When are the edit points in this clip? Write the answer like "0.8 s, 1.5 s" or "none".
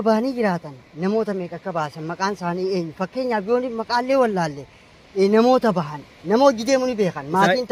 none